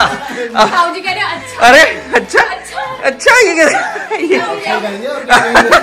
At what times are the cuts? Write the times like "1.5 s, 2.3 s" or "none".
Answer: none